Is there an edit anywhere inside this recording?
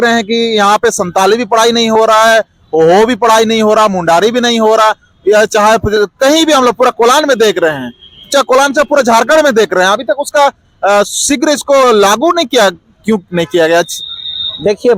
no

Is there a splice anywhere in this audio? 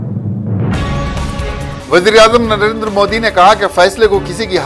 no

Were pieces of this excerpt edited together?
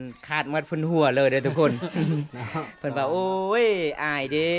no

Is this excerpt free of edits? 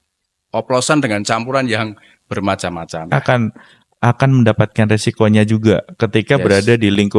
no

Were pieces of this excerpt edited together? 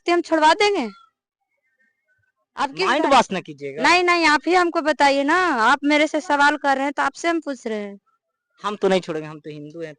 no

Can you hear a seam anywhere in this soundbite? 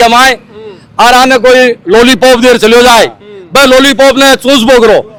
no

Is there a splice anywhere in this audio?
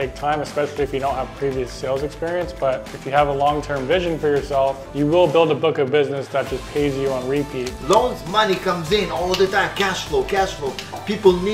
yes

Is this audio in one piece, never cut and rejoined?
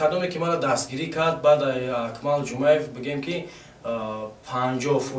yes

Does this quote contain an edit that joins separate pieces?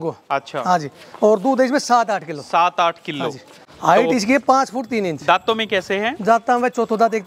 no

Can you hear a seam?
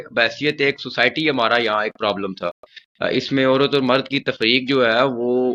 no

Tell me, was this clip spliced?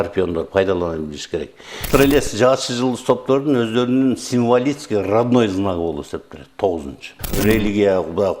yes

